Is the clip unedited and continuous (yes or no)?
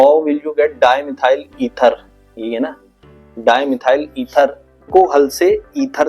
no